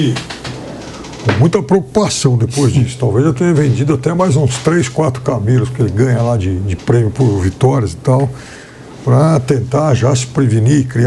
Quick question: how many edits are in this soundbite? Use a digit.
0